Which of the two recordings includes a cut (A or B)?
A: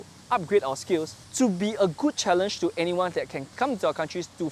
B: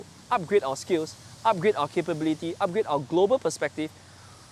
A